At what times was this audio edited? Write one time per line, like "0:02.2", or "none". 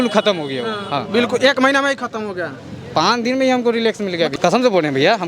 0:04.3